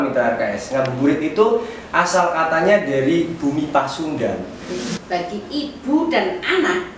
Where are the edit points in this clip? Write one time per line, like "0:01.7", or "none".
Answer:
0:04.8

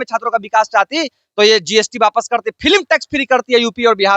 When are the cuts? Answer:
none

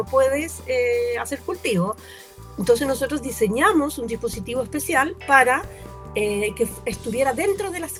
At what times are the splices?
none

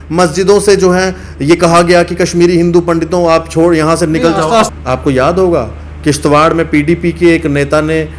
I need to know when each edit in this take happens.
0:04.7

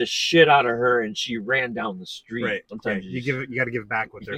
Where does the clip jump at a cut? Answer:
0:02.7

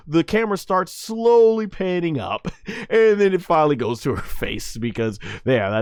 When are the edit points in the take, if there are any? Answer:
none

